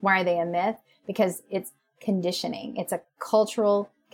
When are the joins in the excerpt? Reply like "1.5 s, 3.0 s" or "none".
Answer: 1.9 s, 3.1 s